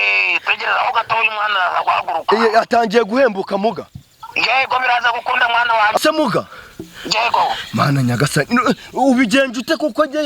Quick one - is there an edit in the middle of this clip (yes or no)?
yes